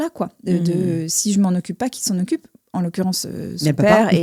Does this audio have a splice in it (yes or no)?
no